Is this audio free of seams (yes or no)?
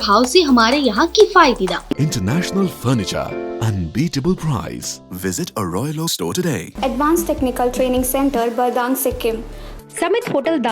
no